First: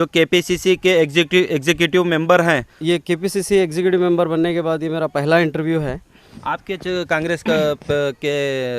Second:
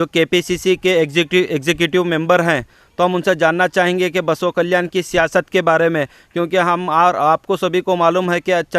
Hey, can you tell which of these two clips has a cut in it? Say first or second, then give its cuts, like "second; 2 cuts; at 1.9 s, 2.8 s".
first; 2 cuts; at 2.7 s, 6.2 s